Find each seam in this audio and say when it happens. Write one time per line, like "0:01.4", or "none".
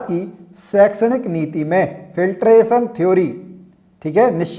none